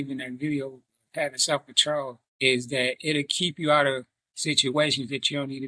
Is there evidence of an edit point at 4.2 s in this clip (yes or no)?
no